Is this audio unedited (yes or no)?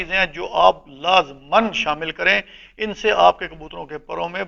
yes